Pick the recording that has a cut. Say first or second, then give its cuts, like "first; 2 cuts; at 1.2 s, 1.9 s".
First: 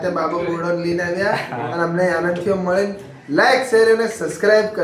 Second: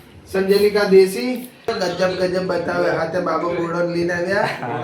second; 1 cut; at 1.7 s